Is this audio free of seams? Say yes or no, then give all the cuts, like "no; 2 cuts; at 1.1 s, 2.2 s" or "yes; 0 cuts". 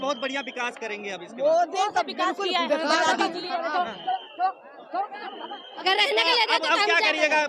no; 1 cut; at 5.7 s